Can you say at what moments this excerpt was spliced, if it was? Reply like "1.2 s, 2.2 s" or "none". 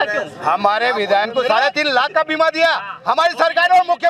1.2 s